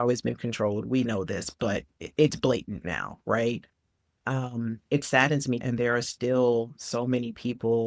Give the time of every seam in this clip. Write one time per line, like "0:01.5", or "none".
0:05.6